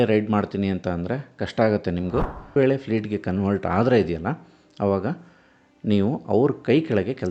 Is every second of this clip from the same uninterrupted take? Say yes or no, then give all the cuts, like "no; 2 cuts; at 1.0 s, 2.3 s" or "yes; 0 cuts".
no; 1 cut; at 2.5 s